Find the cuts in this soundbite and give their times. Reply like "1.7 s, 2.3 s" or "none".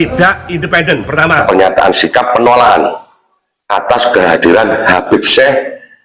1.4 s